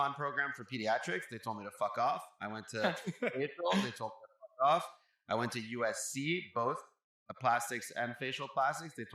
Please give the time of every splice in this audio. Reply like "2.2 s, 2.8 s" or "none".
none